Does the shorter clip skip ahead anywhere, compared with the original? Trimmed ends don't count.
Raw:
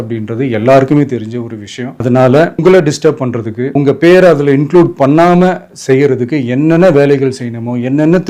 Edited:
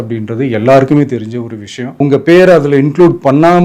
yes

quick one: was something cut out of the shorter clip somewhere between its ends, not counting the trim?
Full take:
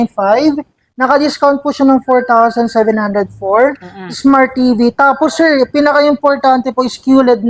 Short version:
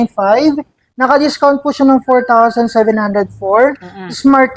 no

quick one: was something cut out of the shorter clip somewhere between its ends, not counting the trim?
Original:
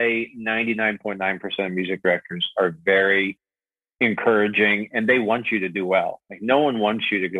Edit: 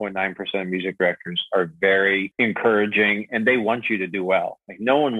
yes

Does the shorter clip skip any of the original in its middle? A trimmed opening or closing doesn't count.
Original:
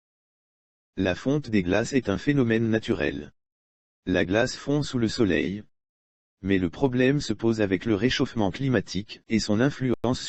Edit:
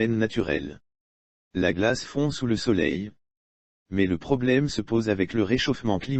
no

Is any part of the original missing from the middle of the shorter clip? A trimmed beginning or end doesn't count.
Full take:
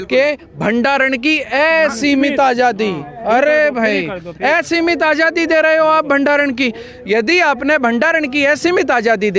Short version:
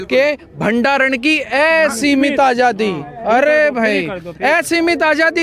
no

